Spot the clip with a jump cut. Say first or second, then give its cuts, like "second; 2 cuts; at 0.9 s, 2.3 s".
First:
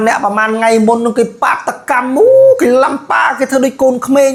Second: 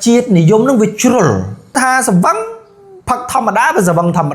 second; 1 cut; at 1.7 s